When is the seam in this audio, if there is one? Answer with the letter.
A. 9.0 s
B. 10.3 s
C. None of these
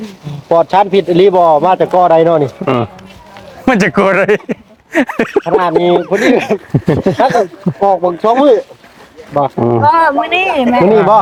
C